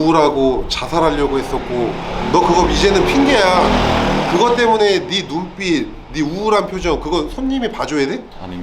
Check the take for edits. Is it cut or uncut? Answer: uncut